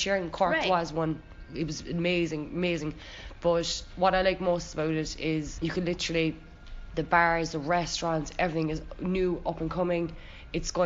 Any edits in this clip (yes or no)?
no